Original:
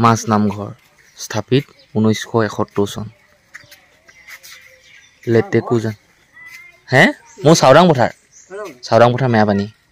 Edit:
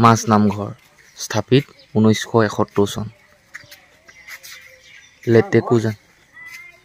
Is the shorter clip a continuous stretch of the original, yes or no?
yes